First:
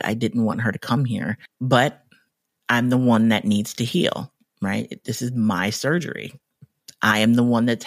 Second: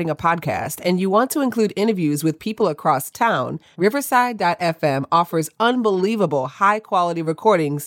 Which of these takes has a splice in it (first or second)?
first